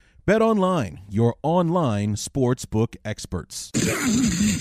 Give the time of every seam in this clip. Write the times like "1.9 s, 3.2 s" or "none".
3.6 s